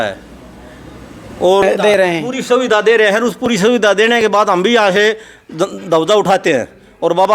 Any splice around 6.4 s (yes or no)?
no